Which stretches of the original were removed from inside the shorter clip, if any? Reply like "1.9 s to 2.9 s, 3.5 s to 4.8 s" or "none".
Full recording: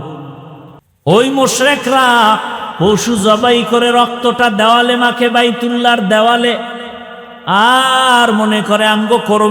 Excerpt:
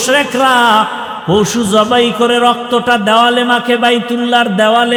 none